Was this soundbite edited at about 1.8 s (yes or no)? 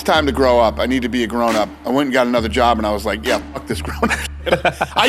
yes